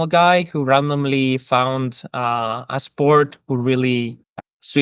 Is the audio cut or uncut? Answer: uncut